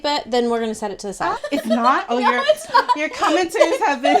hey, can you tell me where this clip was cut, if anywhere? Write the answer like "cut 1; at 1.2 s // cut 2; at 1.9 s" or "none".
cut 1; at 1.4 s